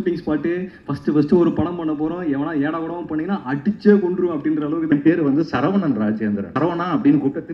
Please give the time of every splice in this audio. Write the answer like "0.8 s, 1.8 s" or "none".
4.9 s, 6.5 s